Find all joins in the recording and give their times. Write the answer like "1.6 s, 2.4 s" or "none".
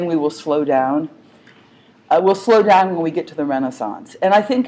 2.2 s